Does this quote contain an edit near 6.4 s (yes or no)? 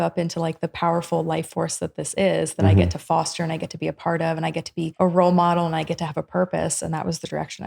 no